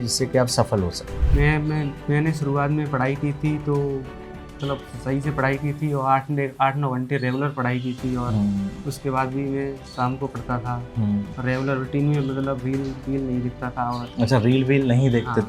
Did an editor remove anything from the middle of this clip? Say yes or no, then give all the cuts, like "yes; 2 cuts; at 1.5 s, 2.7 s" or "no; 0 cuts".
no; 0 cuts